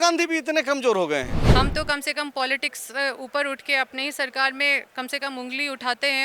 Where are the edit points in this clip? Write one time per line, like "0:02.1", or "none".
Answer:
0:01.4